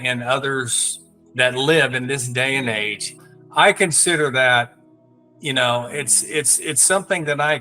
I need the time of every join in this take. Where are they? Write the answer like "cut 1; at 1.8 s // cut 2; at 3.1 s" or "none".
cut 1; at 3.2 s